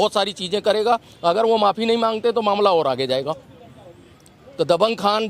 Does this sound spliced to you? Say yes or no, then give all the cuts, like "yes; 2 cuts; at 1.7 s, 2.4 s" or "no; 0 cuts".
no; 0 cuts